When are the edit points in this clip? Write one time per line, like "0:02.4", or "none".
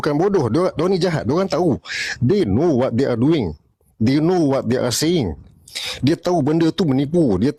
none